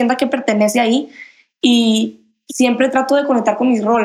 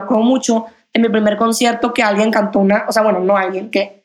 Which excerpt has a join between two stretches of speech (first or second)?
first